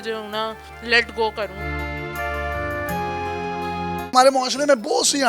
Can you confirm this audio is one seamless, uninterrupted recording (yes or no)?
no